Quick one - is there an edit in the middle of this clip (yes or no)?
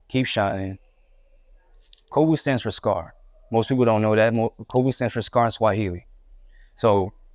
no